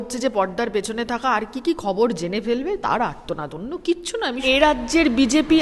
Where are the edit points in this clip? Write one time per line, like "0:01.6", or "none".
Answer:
0:04.4